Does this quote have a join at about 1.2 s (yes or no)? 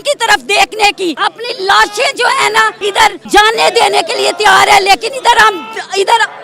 yes